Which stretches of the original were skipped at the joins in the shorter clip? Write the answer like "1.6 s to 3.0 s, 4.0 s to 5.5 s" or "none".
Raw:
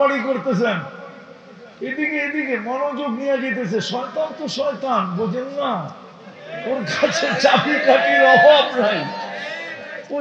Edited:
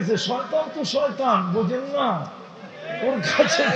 none